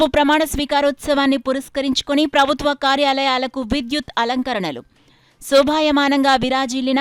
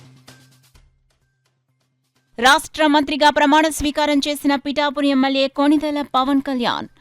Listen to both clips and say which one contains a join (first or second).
second